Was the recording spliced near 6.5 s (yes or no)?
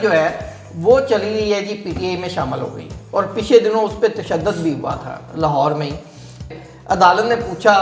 yes